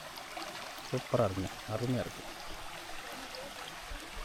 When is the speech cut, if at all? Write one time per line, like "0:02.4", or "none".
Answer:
none

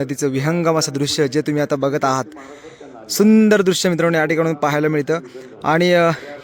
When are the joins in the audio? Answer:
none

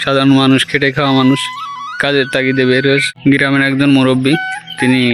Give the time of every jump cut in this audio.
0:03.1

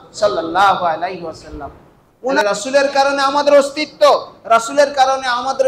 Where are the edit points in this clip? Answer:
0:02.4

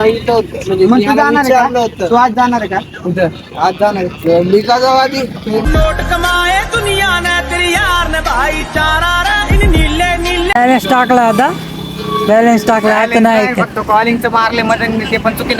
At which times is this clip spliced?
0:05.6
0:10.6

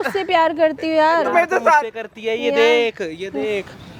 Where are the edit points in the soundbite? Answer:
none

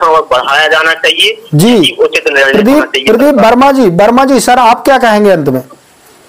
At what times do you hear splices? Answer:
none

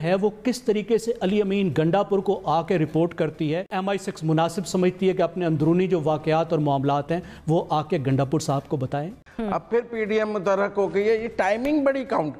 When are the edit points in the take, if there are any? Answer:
0:03.8
0:09.2

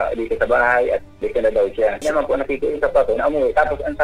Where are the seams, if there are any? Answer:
0:01.1
0:02.0

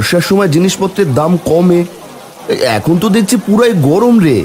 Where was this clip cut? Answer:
none

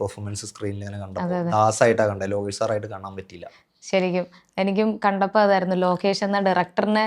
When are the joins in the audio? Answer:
none

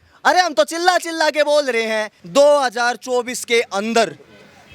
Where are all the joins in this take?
0:02.1

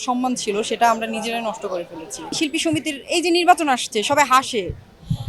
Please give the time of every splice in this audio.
0:02.3

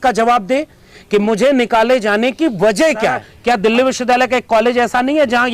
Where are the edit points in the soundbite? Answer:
0:03.3

